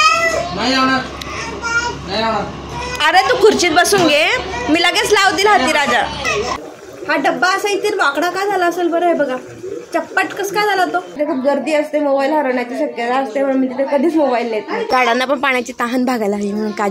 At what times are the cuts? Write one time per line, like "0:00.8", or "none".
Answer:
0:06.6
0:11.1
0:14.8